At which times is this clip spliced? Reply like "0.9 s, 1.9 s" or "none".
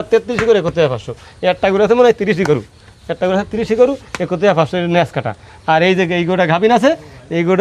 none